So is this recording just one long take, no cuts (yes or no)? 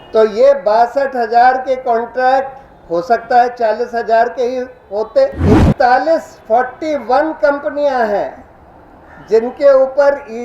no